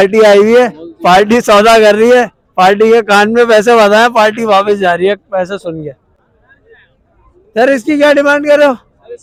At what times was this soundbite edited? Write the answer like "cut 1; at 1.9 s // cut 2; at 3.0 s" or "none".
none